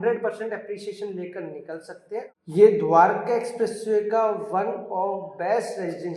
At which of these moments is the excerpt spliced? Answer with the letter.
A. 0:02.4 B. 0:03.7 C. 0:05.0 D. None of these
A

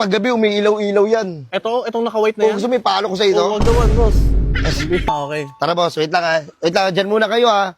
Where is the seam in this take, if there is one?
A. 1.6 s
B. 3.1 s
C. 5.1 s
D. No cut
C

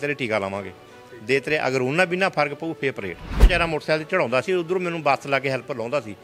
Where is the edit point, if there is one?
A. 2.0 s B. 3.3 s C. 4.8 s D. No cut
B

